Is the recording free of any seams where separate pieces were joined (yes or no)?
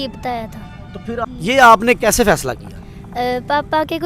no